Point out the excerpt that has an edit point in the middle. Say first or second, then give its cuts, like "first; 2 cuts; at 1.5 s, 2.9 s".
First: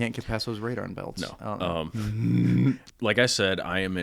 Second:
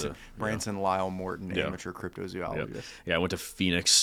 first; 1 cut; at 2.9 s